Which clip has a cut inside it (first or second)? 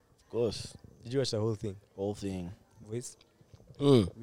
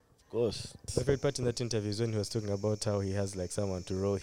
second